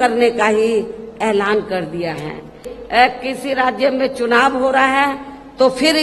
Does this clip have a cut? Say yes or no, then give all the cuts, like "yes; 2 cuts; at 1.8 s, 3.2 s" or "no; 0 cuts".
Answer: yes; 1 cut; at 2.7 s